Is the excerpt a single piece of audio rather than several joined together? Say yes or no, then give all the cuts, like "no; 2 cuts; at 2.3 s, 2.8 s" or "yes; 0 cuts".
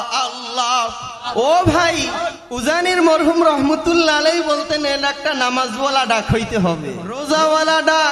no; 3 cuts; at 1.3 s, 2.4 s, 7.2 s